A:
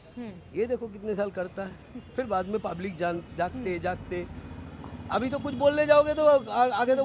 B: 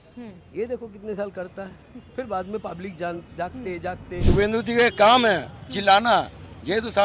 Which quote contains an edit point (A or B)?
B